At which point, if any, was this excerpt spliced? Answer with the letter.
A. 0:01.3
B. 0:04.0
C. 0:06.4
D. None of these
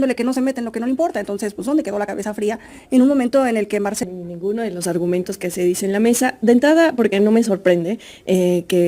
B